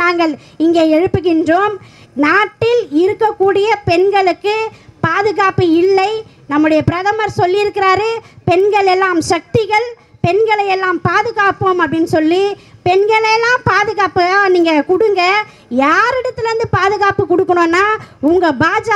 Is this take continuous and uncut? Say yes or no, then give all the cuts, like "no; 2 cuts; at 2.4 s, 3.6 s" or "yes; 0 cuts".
yes; 0 cuts